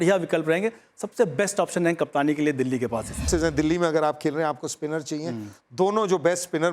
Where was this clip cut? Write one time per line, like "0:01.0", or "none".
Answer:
0:03.2